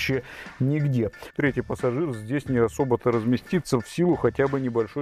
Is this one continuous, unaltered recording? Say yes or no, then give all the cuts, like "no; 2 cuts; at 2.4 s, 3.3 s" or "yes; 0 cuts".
no; 1 cut; at 1.3 s